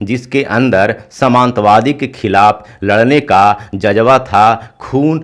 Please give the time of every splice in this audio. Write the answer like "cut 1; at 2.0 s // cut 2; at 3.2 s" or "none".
none